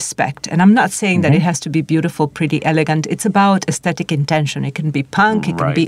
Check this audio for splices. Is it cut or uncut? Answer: uncut